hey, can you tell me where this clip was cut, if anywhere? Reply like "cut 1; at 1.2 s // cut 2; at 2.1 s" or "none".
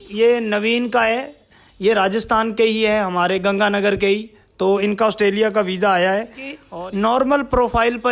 cut 1; at 6.6 s